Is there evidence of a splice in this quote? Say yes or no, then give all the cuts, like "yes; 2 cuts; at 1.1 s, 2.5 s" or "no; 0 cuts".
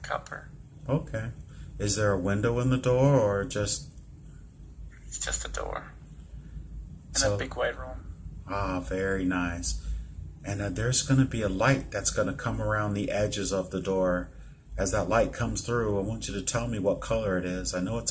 yes; 1 cut; at 16.5 s